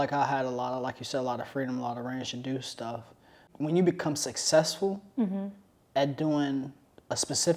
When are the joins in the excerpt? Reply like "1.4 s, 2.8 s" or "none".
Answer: 3.4 s